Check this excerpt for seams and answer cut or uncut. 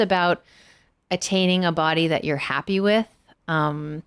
uncut